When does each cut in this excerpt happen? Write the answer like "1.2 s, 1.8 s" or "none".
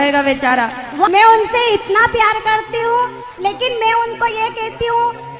1.1 s